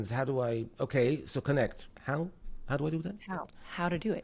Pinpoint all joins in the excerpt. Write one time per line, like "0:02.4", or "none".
0:01.9